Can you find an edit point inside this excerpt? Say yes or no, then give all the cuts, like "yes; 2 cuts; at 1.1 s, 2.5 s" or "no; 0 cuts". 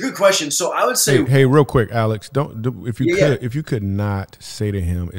yes; 1 cut; at 1.3 s